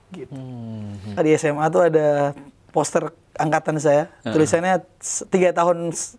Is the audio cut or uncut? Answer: cut